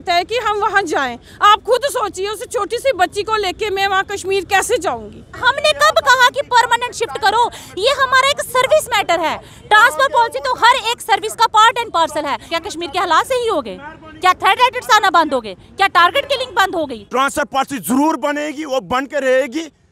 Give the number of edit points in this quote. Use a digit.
3